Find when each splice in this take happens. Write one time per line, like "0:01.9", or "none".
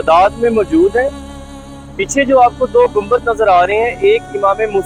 none